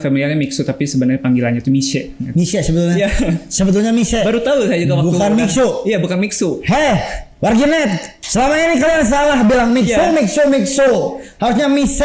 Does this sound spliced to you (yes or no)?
no